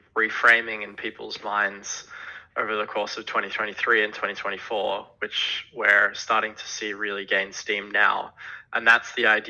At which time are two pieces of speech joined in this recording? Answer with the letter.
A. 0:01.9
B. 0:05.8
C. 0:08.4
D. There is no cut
D